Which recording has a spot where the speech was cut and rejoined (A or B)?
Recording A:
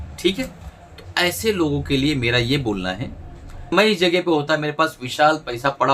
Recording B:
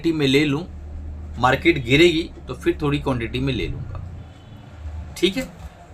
A